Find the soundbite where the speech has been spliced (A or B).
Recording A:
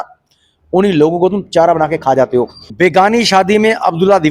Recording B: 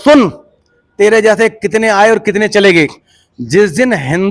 A